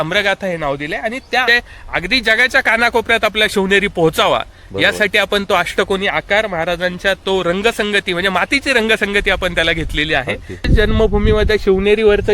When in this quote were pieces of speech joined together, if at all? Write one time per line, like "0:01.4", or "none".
0:01.5
0:10.7